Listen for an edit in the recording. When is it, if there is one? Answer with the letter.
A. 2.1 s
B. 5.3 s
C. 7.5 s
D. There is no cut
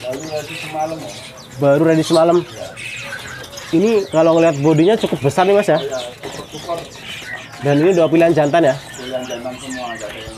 D